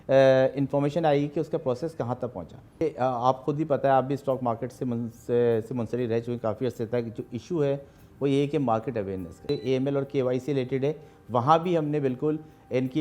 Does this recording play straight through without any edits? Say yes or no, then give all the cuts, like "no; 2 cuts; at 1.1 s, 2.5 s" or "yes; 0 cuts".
no; 2 cuts; at 2.8 s, 9.5 s